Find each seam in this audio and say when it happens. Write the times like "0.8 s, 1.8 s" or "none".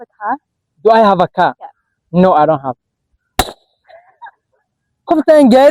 none